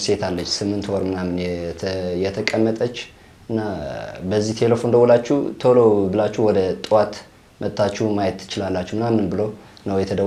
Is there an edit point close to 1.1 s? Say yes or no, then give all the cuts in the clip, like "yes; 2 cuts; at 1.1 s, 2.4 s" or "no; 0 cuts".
no; 0 cuts